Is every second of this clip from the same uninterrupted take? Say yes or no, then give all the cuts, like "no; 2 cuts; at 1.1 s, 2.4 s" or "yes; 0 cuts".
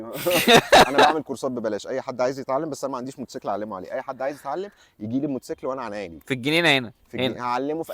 yes; 0 cuts